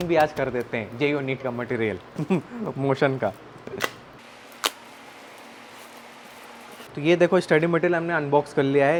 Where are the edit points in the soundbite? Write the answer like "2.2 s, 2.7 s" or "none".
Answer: none